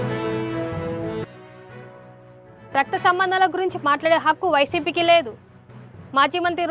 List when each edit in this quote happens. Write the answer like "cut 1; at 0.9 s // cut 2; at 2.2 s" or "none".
none